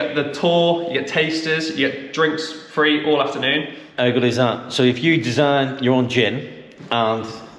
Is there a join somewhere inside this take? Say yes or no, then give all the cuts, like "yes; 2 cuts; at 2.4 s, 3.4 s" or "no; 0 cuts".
yes; 1 cut; at 3.8 s